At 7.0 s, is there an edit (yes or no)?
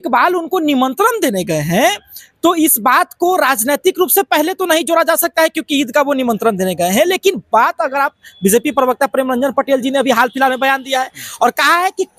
no